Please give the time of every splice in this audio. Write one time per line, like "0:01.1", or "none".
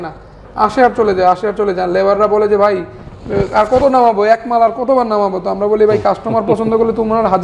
none